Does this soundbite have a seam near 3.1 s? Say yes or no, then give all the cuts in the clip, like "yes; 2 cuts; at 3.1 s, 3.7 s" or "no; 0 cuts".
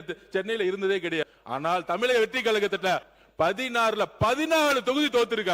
yes; 2 cuts; at 1.3 s, 3.1 s